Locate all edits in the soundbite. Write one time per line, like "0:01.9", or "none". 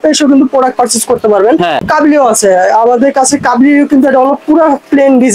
0:01.9